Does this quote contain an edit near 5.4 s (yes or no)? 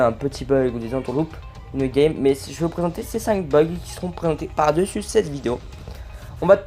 no